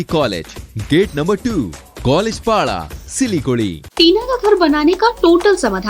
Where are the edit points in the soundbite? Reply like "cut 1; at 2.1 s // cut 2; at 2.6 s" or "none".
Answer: cut 1; at 3.8 s